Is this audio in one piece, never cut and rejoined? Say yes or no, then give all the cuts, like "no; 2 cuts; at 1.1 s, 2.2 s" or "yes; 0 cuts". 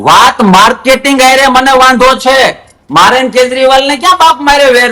yes; 0 cuts